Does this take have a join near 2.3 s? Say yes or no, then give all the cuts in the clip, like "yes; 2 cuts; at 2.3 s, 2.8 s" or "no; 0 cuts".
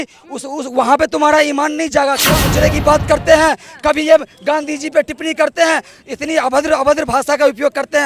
yes; 1 cut; at 2.3 s